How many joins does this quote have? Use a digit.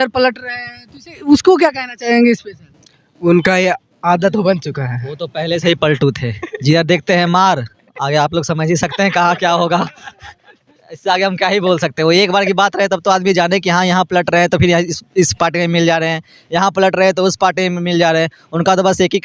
0